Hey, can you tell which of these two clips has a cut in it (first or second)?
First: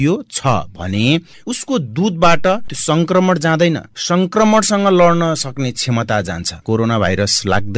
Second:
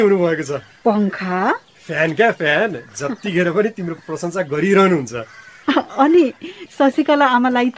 first